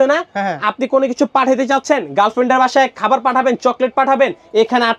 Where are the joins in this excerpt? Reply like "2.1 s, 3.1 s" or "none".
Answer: none